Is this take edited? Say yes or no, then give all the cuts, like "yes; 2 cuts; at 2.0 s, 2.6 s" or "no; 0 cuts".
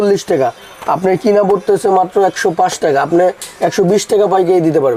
no; 0 cuts